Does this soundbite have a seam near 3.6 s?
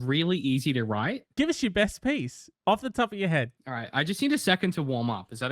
yes; 2 cuts; at 1.3 s, 3.6 s

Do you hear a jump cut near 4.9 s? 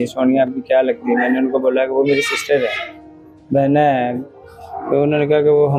no; 0 cuts

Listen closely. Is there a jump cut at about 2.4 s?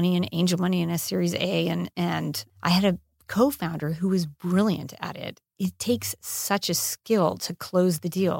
yes; 1 cut; at 2.4 s

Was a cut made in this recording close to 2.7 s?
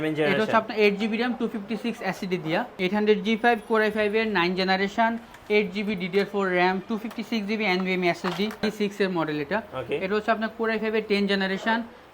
yes; 2 cuts; at 2.7 s, 8.6 s

